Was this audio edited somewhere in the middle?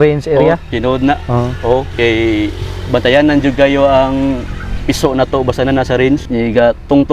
no; 0 cuts

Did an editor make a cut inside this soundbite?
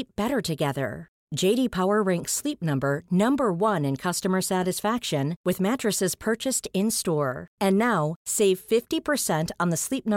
no; 0 cuts

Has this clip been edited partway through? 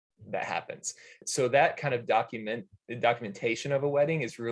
yes; 1 cut; at 1.2 s

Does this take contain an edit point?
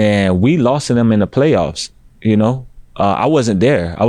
no; 0 cuts

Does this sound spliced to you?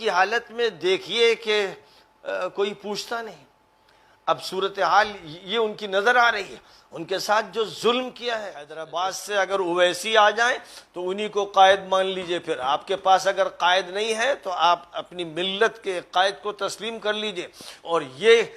yes; 1 cut; at 8.8 s

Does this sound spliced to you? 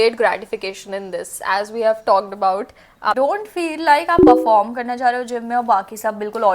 yes; 1 cut; at 3.1 s

